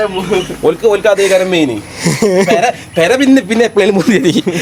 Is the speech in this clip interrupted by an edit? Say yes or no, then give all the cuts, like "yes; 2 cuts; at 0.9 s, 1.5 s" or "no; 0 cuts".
no; 0 cuts